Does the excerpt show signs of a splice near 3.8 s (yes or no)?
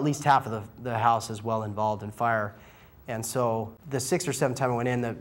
yes